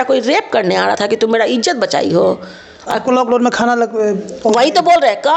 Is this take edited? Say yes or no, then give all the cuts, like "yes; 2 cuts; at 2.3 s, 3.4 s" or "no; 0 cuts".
no; 0 cuts